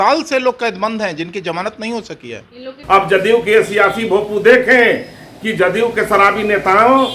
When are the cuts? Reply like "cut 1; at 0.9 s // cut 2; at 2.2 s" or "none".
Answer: cut 1; at 2.7 s